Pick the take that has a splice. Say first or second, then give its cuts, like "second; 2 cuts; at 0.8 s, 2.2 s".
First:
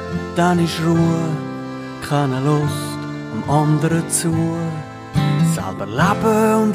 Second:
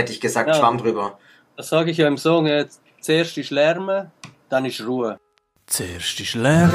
second; 1 cut; at 5.2 s